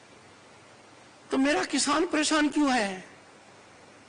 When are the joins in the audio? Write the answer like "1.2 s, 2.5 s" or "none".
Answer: none